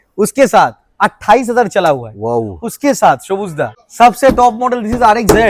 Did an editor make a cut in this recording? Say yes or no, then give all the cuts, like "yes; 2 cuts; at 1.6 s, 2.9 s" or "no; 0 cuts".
yes; 1 cut; at 3.8 s